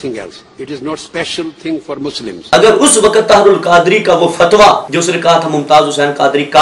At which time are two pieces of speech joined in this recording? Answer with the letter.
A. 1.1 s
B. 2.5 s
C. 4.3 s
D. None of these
B